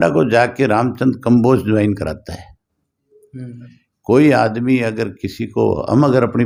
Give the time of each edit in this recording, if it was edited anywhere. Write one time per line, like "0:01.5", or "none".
none